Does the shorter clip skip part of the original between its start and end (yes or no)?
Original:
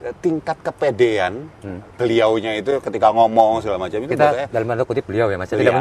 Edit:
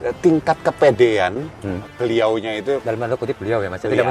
yes